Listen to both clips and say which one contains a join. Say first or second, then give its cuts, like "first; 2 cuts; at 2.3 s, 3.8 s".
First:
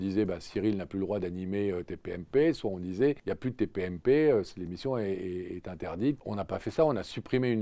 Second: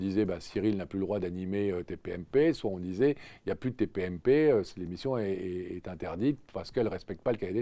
first; 2 cuts; at 3.3 s, 6.2 s